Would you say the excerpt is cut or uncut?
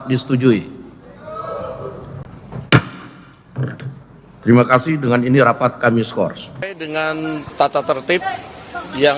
cut